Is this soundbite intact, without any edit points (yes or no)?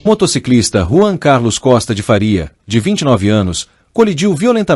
yes